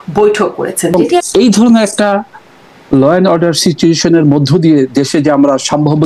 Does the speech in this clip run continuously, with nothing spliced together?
no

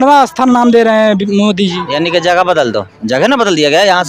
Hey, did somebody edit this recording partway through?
yes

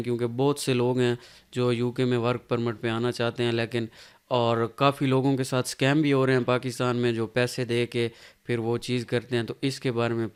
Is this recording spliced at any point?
no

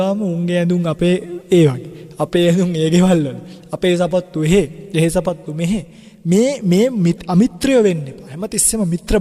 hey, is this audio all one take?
yes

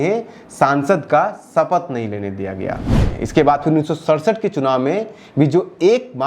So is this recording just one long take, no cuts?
no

